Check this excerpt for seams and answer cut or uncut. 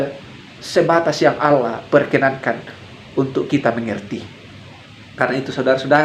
uncut